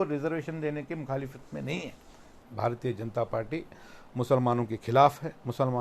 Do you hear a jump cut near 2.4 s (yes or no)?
yes